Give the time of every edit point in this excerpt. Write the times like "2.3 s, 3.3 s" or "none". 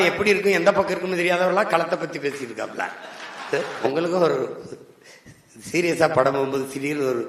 3.8 s